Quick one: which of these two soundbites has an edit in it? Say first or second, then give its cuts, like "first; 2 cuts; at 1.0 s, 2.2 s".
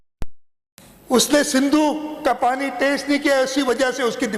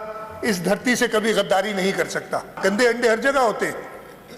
second; 1 cut; at 2.5 s